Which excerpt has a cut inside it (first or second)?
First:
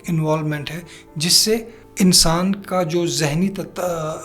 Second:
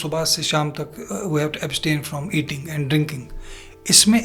first